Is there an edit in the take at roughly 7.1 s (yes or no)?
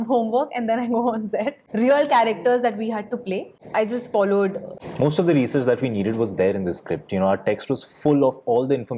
no